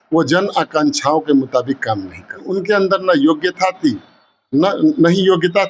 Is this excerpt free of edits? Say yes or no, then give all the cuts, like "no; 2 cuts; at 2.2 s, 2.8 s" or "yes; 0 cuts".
no; 1 cut; at 2.5 s